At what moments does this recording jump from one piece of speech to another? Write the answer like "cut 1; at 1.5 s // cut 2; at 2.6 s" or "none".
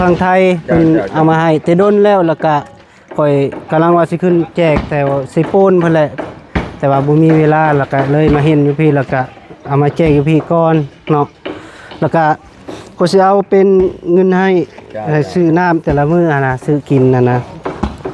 none